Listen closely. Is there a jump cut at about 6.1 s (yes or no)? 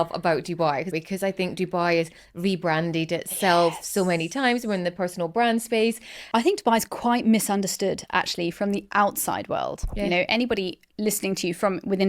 yes